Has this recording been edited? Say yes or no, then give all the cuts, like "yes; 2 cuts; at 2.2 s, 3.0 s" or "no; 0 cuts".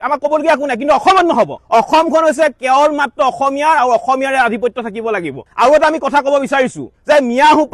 no; 0 cuts